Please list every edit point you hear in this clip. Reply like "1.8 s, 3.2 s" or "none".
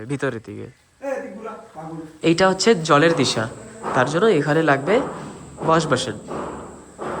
2.1 s